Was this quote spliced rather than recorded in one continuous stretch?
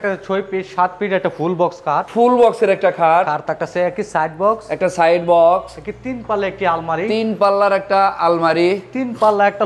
yes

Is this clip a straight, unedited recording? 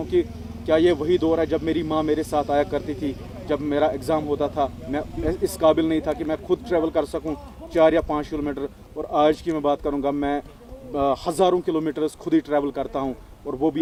yes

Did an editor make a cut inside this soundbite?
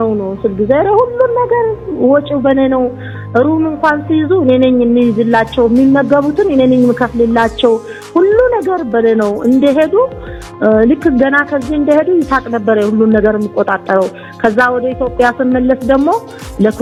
no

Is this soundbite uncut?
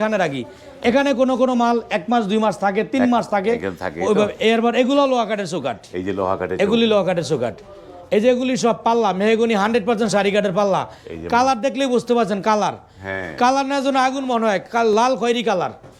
yes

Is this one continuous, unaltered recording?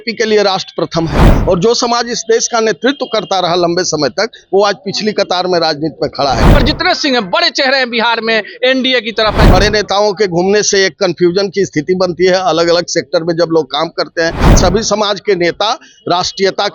no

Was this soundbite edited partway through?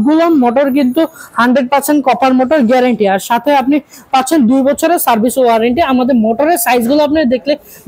no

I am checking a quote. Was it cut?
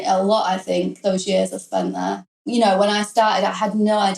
yes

